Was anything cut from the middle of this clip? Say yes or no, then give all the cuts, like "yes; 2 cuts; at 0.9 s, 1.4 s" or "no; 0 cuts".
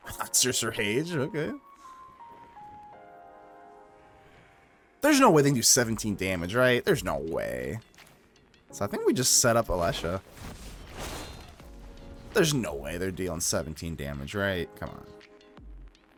no; 0 cuts